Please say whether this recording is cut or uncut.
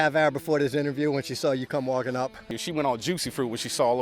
cut